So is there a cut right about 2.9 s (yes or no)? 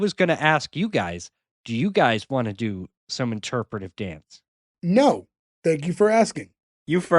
no